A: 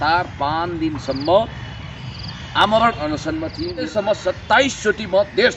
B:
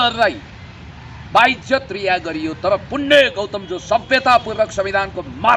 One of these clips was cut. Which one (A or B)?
A